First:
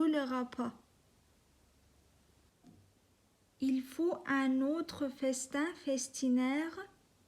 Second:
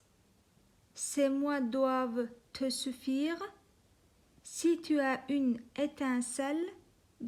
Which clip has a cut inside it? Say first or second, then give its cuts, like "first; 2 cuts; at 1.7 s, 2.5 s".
first; 1 cut; at 2.4 s